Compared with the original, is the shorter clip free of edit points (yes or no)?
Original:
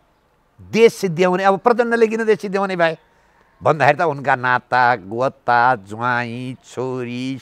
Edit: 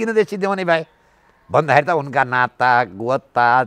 yes